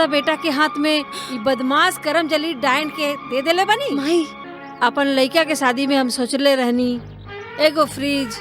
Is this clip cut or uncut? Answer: cut